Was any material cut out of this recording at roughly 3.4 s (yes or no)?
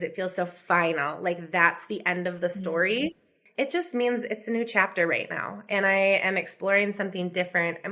yes